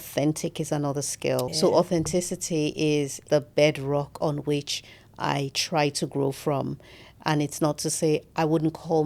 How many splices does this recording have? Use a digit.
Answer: 2